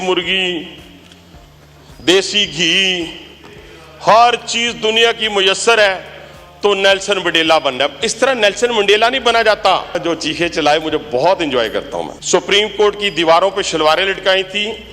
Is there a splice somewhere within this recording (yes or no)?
yes